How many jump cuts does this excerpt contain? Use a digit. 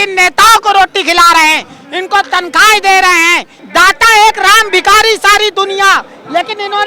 1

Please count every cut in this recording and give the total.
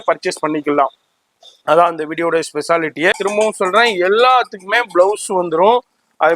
1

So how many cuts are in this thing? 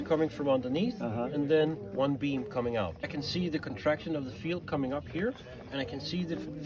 1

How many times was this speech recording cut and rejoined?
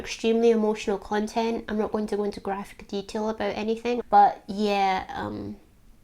1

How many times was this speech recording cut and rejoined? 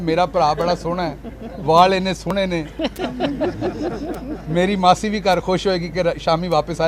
0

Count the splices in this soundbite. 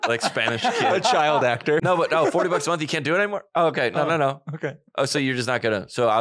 1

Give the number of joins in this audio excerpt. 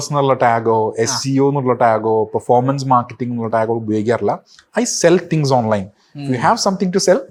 0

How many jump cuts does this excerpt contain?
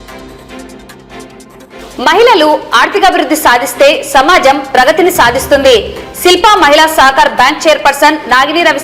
1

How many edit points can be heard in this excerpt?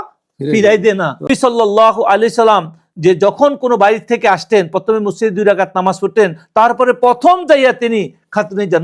1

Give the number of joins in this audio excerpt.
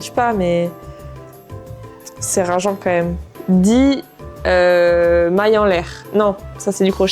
1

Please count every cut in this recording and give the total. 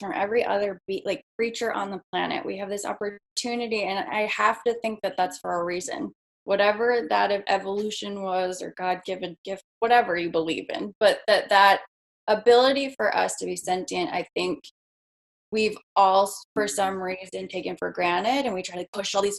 0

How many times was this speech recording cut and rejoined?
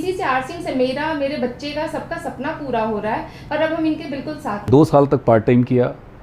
1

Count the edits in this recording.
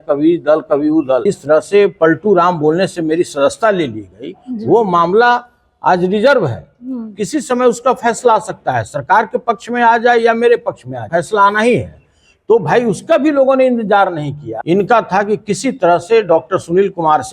3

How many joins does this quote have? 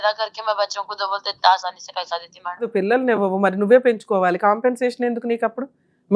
1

